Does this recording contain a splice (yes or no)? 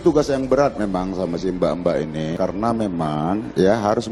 yes